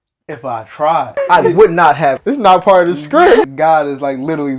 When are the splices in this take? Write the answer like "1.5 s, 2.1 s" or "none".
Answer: 1.1 s, 2.2 s, 3.5 s